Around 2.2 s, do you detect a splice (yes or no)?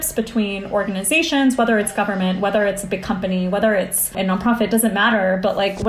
no